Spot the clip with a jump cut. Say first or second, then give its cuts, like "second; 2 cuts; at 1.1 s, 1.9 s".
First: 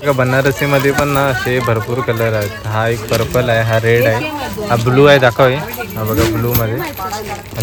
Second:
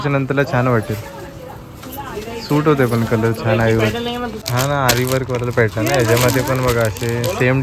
second; 1 cut; at 4.4 s